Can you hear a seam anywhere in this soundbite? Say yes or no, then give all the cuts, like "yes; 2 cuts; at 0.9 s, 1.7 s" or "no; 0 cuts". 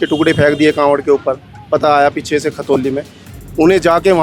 no; 0 cuts